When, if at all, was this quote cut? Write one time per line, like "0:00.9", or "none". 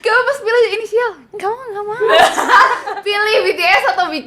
0:02.9